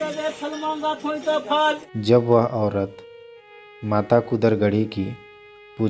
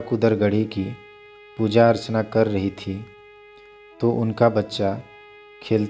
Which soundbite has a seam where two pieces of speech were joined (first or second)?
first